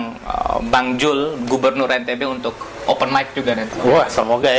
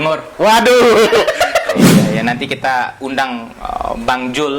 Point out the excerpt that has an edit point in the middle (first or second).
second